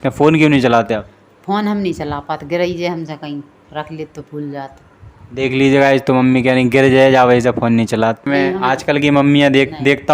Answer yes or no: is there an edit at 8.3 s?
yes